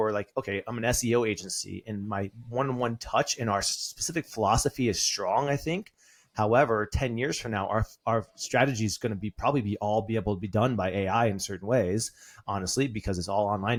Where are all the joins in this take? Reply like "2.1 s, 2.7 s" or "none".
none